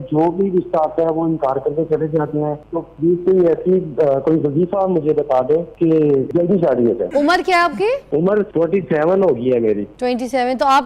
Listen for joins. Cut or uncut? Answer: cut